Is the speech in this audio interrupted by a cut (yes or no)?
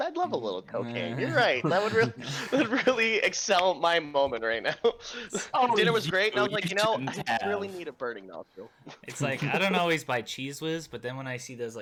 no